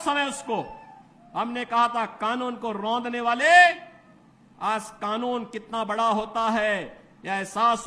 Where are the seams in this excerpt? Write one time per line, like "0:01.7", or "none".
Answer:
none